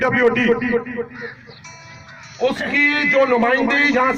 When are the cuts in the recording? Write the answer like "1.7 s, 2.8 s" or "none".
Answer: none